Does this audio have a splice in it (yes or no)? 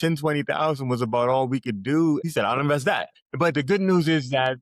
yes